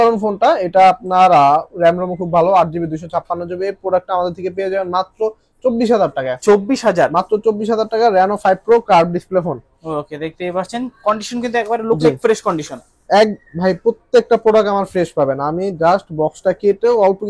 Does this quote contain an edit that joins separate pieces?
no; 0 cuts

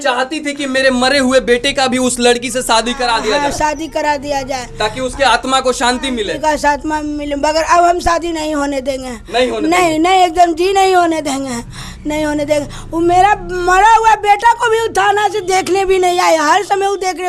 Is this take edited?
no; 0 cuts

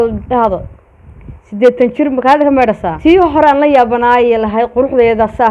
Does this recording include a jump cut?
yes; 1 cut; at 2.9 s

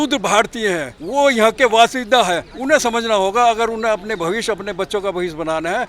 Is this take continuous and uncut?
no; 2 cuts; at 0.9 s, 2.5 s

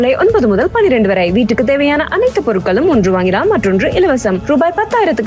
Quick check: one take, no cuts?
yes; 0 cuts

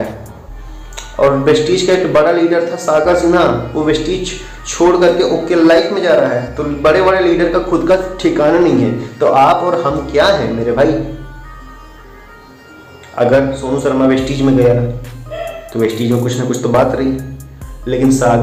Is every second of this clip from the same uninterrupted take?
yes; 0 cuts

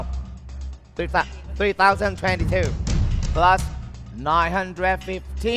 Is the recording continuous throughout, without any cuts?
yes; 0 cuts

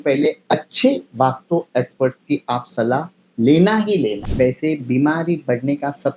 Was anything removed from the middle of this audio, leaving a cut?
yes; 1 cut; at 4.2 s

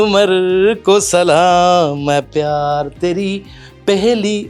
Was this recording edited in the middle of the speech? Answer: no; 0 cuts

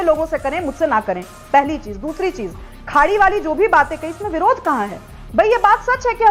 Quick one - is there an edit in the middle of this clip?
no; 0 cuts

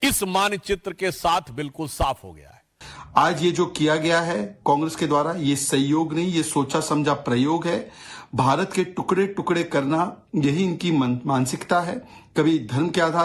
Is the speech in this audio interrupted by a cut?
no; 0 cuts

